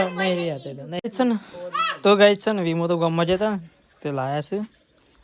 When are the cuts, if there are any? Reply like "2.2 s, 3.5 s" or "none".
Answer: 1.0 s